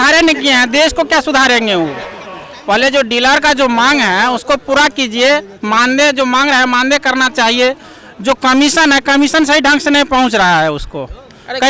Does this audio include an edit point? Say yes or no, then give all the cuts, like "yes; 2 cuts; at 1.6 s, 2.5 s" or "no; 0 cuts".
no; 0 cuts